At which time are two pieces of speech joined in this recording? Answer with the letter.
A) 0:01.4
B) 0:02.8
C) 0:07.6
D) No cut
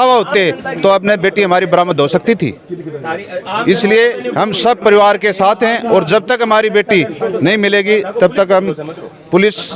D